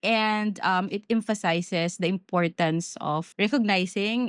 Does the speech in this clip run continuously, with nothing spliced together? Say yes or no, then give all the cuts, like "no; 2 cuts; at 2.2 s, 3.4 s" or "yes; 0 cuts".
no; 1 cut; at 3.3 s